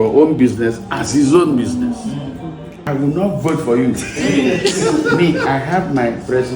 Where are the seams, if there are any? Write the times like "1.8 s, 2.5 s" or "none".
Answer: 2.8 s